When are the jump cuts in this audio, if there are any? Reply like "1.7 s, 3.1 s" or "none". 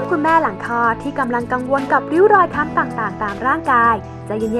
none